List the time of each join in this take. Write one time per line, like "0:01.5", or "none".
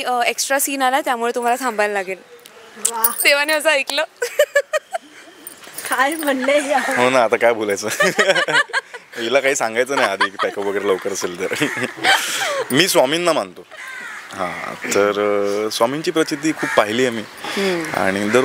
none